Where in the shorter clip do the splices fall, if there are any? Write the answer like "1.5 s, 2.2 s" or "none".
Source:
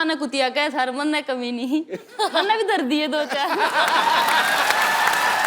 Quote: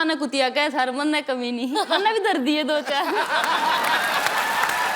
1.7 s